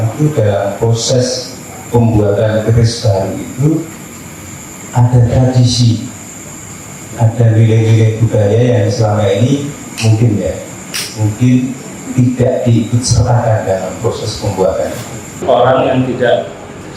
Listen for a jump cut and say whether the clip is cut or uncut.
cut